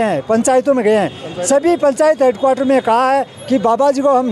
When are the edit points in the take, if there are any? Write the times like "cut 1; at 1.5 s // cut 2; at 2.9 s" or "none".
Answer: none